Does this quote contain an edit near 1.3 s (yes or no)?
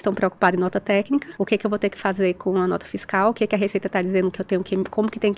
yes